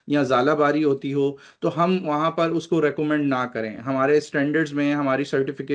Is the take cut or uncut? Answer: uncut